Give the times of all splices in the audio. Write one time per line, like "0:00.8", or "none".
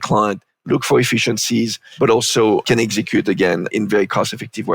0:01.8
0:02.6
0:03.7